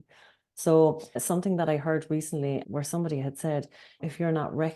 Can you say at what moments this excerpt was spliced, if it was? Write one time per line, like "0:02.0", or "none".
0:01.1